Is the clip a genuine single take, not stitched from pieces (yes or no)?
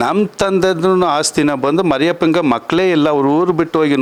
yes